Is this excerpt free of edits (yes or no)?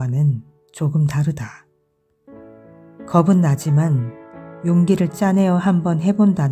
yes